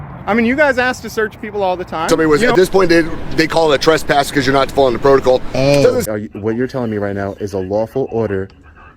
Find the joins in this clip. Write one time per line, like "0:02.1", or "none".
0:02.0
0:06.0